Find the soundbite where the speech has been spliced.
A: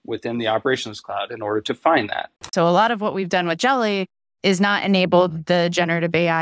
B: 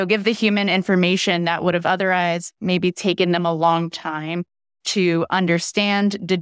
A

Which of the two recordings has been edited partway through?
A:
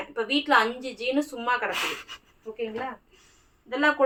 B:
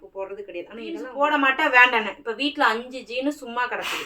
B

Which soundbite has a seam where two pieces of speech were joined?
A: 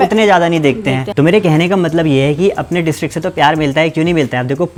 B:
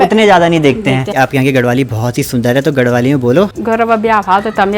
B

